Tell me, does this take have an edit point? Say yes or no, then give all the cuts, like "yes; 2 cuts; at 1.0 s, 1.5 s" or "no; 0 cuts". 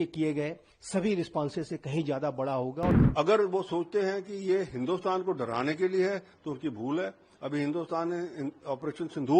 yes; 1 cut; at 3.0 s